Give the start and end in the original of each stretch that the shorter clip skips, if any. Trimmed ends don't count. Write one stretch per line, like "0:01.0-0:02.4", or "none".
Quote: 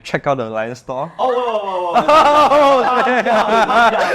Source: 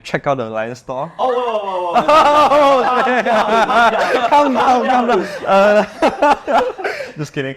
none